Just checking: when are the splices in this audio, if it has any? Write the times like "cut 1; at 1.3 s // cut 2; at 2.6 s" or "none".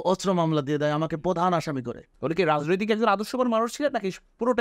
cut 1; at 2.0 s